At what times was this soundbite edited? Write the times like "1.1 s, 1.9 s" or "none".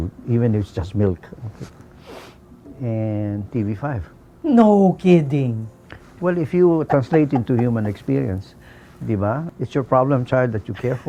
none